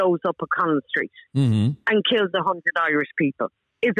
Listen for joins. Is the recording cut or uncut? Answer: uncut